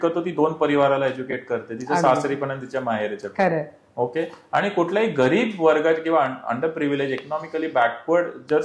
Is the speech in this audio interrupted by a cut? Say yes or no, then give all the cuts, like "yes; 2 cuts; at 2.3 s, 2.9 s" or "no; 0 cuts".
no; 0 cuts